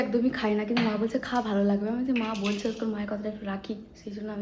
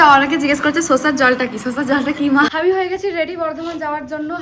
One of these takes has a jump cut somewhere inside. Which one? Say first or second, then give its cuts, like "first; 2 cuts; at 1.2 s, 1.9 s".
second; 1 cut; at 2.5 s